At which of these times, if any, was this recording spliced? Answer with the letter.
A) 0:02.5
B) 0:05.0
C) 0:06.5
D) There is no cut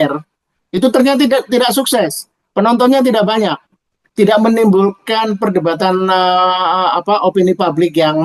D